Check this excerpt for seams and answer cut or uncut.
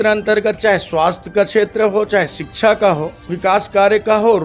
cut